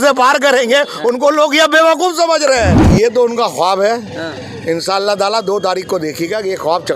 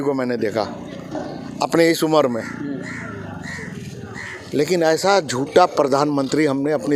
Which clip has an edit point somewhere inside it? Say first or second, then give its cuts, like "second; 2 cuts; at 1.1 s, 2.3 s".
first; 1 cut; at 2.8 s